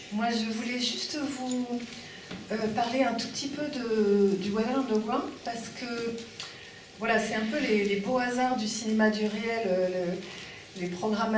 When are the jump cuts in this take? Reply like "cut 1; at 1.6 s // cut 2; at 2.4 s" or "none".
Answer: cut 1; at 1.4 s